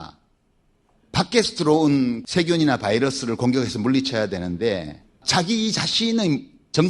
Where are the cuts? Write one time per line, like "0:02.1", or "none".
none

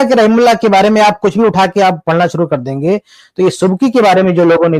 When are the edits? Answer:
none

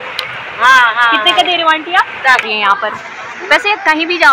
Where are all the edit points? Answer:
0:02.4

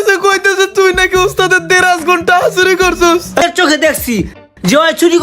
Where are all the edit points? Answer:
0:03.4

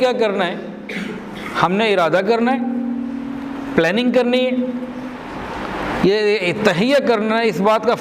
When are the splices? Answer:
none

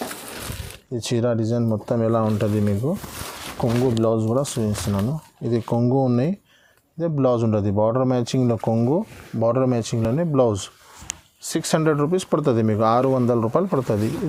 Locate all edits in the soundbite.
none

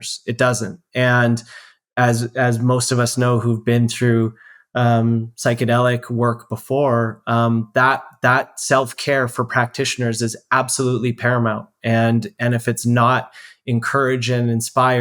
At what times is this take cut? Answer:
none

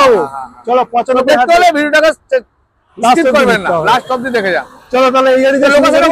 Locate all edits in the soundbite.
none

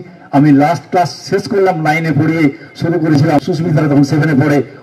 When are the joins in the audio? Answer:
0:03.4

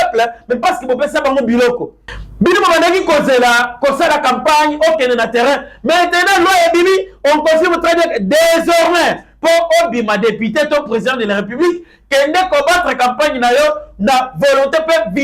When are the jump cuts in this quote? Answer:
0:01.9

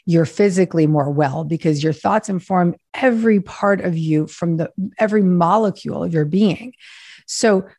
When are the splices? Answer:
none

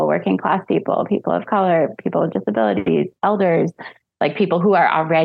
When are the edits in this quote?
0:03.1

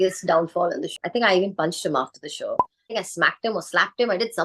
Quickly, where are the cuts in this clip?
0:00.9
0:02.9

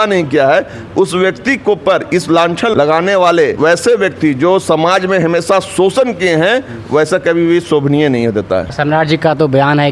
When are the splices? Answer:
0:02.7
0:03.5
0:08.7

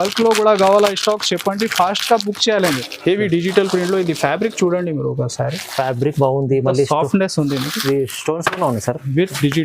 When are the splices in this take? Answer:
0:02.9

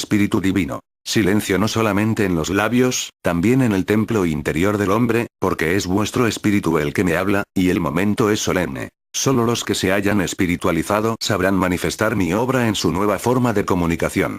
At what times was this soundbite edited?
0:09.8

